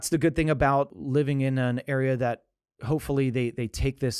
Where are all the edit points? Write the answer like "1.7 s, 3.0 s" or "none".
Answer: 0.9 s